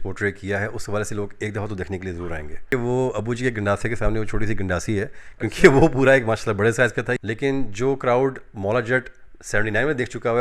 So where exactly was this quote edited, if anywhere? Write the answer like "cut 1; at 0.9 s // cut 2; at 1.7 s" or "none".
cut 1; at 2.7 s // cut 2; at 7.1 s